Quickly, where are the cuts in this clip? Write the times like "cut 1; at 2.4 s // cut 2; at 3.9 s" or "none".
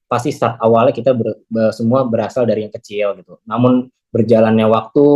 none